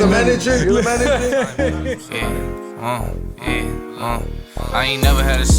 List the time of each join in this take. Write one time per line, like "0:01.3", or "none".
0:01.7